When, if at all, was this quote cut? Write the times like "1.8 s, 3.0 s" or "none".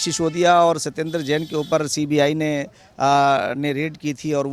none